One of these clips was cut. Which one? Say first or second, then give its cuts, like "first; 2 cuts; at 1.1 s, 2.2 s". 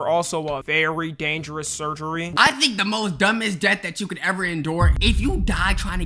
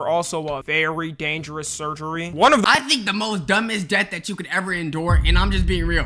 first; 2 cuts; at 2.4 s, 4.9 s